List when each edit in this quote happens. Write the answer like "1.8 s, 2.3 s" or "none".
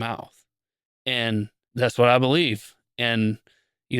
1.6 s